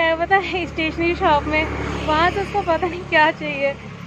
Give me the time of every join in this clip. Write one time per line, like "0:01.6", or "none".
none